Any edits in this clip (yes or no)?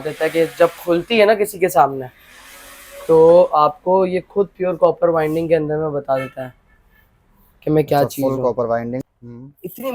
yes